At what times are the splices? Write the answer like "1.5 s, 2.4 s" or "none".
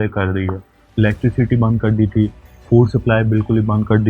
2.5 s